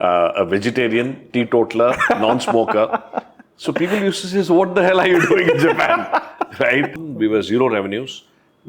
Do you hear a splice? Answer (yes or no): yes